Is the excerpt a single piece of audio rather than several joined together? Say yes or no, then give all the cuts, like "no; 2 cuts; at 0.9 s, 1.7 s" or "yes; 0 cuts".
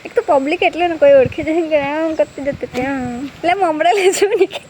no; 1 cut; at 3.3 s